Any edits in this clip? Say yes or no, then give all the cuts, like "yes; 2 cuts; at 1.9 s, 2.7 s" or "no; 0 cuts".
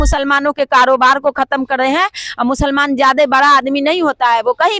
no; 0 cuts